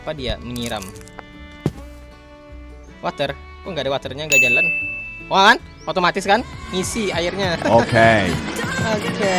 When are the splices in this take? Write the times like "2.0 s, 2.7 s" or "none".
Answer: none